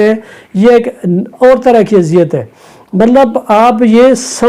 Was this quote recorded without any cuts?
yes; 0 cuts

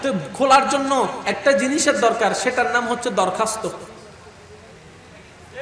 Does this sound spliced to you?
no; 0 cuts

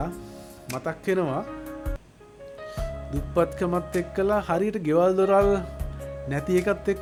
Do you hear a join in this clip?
no; 0 cuts

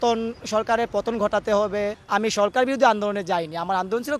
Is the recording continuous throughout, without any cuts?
no; 1 cut; at 2.0 s

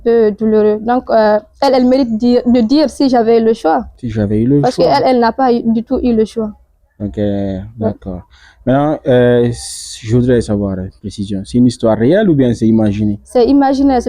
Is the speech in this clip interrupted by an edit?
no; 0 cuts

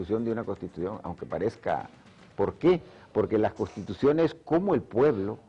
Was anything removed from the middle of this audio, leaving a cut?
no; 0 cuts

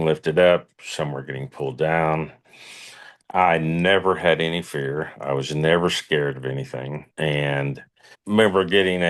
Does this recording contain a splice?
yes; 1 cut; at 7.1 s

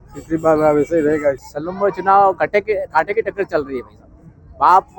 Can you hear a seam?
yes; 1 cut; at 1.5 s

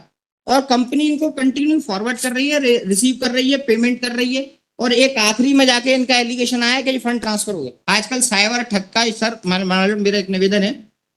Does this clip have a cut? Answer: yes; 1 cut; at 7.7 s

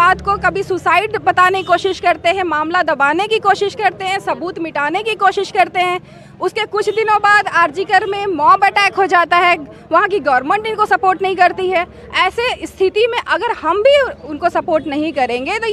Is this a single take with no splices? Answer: yes; 0 cuts

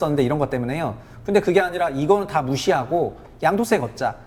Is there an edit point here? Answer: no; 0 cuts

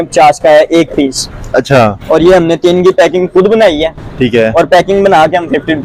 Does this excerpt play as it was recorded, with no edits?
yes; 0 cuts

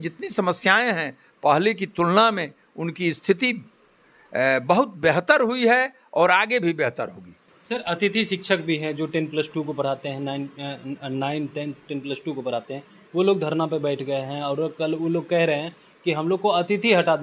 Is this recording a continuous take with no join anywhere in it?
yes; 0 cuts

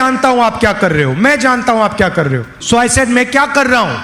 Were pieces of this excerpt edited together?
yes; 1 cut; at 2.6 s

